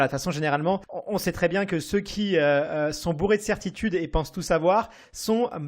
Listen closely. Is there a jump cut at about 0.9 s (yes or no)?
yes